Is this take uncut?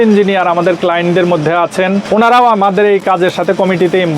no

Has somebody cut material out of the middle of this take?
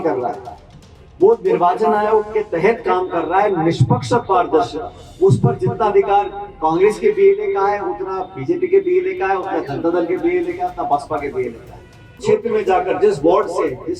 yes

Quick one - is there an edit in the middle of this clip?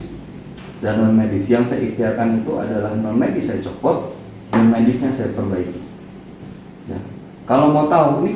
no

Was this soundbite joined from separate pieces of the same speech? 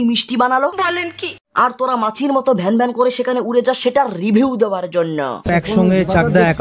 yes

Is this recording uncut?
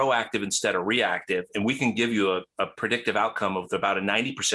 yes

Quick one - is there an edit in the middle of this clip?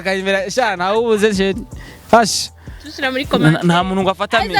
no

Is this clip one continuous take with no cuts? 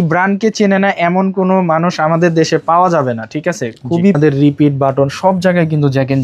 no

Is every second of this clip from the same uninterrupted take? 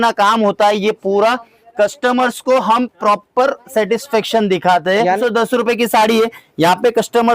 no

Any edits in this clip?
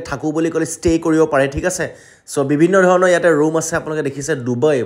no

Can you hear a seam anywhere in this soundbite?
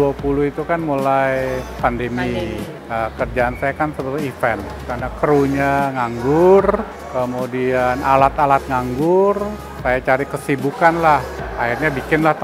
yes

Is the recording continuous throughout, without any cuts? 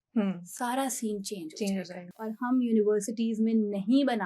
no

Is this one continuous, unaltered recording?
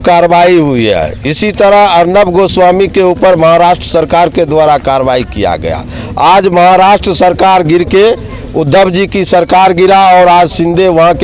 yes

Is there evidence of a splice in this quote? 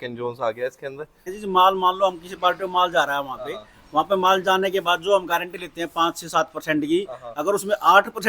yes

